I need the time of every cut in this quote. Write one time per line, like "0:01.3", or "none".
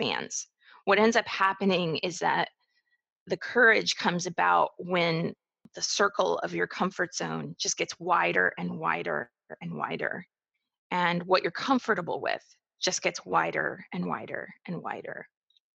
0:05.8